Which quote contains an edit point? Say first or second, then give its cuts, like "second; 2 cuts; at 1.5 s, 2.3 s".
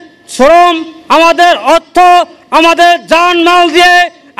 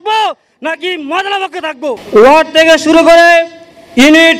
second; 1 cut; at 2.0 s